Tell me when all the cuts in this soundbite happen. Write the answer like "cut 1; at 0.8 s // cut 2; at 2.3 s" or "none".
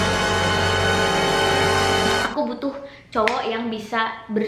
cut 1; at 2.3 s